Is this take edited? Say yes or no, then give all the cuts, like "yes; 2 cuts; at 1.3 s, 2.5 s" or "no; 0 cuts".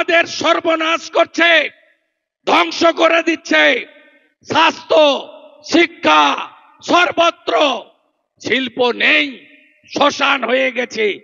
no; 0 cuts